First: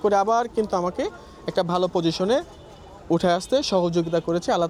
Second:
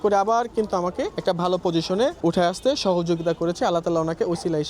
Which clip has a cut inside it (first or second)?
second